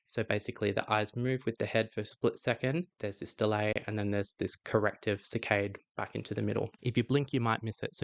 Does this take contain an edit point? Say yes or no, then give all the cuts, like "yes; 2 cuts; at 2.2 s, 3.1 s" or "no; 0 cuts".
yes; 2 cuts; at 2.9 s, 6.8 s